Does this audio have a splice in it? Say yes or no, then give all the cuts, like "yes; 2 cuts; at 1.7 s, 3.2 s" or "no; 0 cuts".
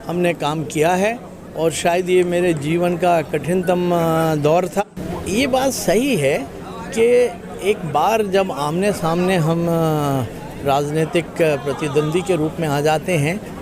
yes; 1 cut; at 4.8 s